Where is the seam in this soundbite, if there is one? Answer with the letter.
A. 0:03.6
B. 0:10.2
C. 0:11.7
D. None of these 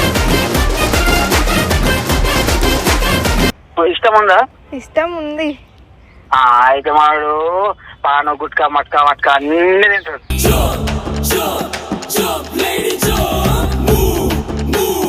A